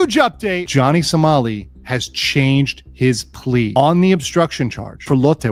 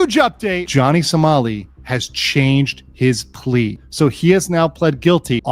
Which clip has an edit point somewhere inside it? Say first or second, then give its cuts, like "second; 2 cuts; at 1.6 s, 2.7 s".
second; 1 cut; at 3.7 s